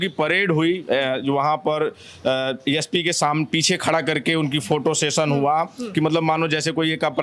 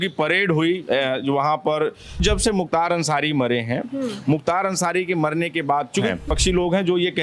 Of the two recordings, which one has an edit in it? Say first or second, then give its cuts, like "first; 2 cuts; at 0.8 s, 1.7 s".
second; 2 cuts; at 2.2 s, 6.1 s